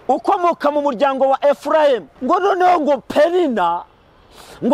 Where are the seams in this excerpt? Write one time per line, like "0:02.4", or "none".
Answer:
0:02.1